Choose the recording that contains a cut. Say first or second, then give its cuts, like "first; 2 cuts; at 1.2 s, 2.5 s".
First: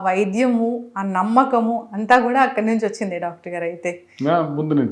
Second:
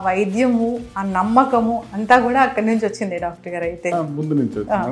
second; 1 cut; at 3.9 s